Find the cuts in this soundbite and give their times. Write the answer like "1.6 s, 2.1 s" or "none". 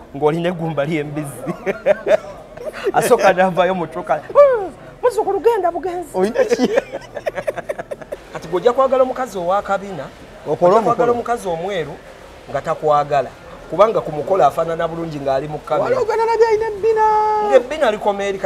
8.2 s